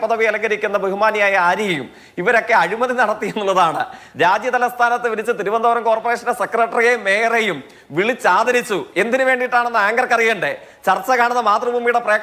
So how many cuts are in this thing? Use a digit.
1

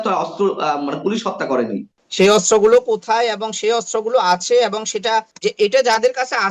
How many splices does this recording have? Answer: 2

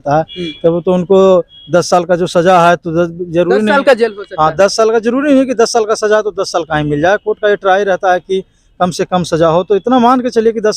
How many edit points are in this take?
0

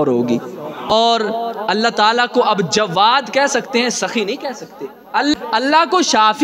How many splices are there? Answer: 2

